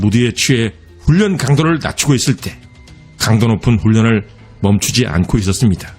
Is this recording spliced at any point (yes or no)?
no